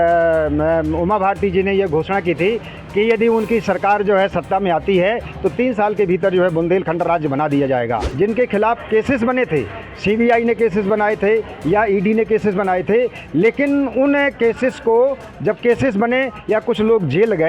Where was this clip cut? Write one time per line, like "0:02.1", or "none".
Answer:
0:08.1